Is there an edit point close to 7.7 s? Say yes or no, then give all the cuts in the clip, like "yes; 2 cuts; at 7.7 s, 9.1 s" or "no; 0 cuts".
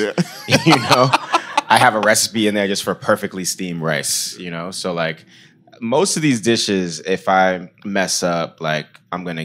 yes; 1 cut; at 7.7 s